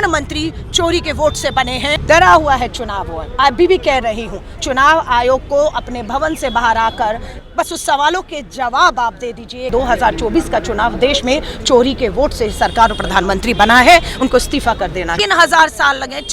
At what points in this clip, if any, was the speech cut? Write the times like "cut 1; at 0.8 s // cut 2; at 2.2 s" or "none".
cut 1; at 2.0 s // cut 2; at 7.3 s // cut 3; at 9.7 s // cut 4; at 15.2 s